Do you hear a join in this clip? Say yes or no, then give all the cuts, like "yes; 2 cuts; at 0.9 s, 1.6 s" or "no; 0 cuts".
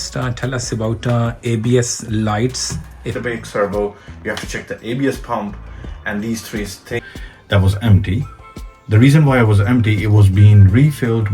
yes; 2 cuts; at 3.1 s, 7.0 s